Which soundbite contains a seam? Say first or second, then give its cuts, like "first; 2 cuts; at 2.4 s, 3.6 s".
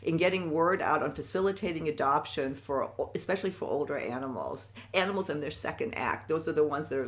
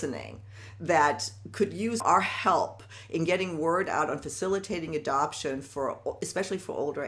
second; 1 cut; at 2.0 s